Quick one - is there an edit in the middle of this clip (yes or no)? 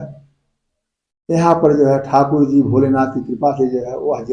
no